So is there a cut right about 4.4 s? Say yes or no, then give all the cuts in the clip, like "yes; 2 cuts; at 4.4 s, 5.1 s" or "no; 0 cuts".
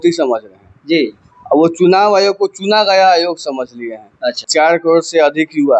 yes; 1 cut; at 4.4 s